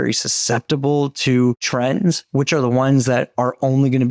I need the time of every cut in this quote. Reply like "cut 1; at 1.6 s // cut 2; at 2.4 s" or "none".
cut 1; at 1.6 s